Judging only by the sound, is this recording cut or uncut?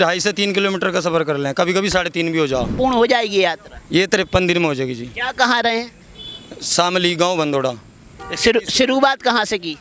cut